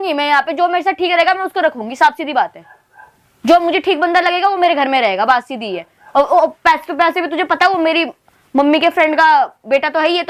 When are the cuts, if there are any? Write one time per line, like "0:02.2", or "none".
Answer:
none

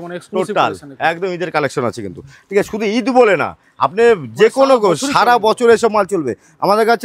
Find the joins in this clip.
none

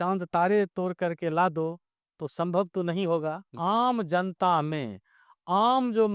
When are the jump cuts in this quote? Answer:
0:03.5

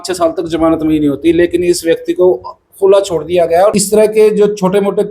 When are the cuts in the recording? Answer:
0:03.8

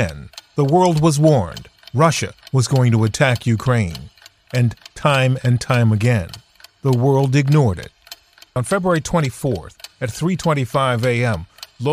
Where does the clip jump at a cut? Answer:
none

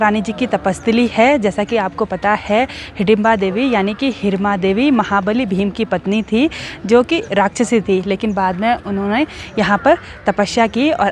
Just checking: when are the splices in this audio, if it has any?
none

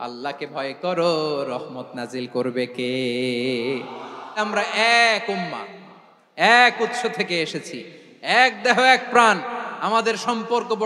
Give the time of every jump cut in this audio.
0:04.4

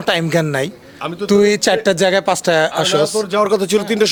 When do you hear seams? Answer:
none

